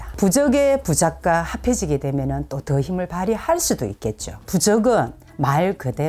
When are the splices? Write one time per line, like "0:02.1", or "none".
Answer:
0:04.3